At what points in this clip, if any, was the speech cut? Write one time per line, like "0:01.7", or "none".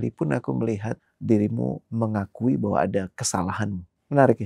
0:01.1
0:01.8